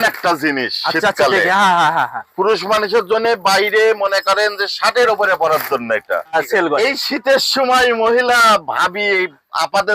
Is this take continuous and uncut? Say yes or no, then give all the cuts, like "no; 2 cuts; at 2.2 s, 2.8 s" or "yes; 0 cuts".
no; 1 cut; at 6.4 s